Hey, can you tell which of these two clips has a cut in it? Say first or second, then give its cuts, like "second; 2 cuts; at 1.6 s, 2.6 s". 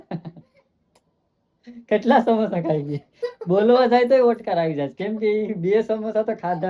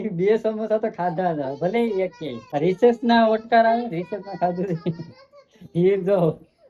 second; 1 cut; at 2.4 s